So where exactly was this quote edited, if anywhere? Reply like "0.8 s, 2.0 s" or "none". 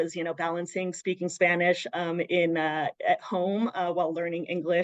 none